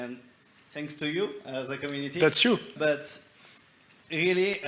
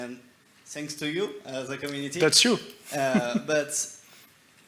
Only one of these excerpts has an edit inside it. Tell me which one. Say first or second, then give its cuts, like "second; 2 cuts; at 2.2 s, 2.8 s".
first; 1 cut; at 2.8 s